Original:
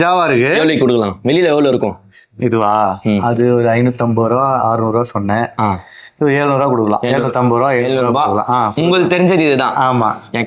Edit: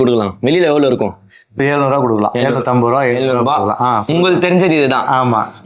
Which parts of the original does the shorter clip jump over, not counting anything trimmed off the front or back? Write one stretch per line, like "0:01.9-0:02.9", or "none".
0:02.4-0:06.3